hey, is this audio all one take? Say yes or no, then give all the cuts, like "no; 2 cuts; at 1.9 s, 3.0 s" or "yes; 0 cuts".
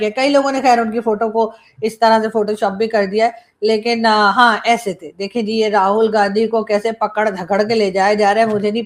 yes; 0 cuts